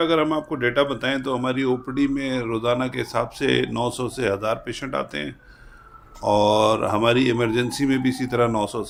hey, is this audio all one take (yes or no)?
yes